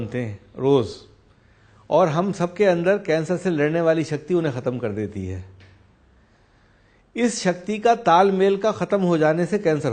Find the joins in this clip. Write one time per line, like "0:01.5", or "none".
none